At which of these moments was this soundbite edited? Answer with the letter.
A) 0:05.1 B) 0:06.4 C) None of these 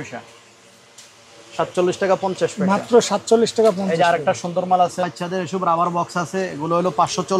A